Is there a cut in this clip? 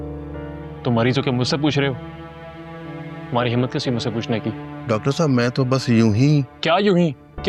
no; 0 cuts

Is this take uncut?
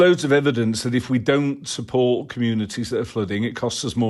yes; 0 cuts

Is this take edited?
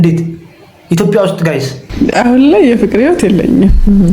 yes; 1 cut; at 1.9 s

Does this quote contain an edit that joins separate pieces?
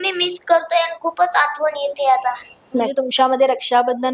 yes; 1 cut; at 2.9 s

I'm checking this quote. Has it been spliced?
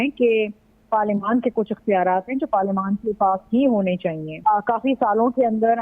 yes; 1 cut; at 4.3 s

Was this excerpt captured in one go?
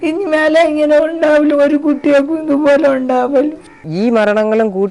no; 1 cut; at 3.9 s

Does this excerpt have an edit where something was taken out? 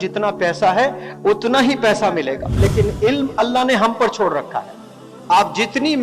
yes; 1 cut; at 2.6 s

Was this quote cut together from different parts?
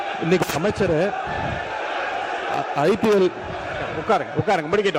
no; 0 cuts

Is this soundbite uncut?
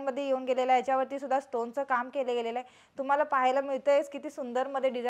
yes; 0 cuts

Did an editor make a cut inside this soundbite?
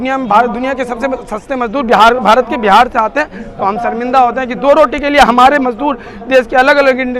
no; 0 cuts

